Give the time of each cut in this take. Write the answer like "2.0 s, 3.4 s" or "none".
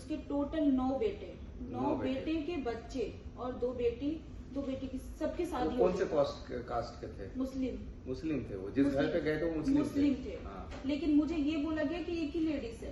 none